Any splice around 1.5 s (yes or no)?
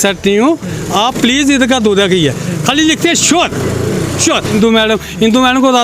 no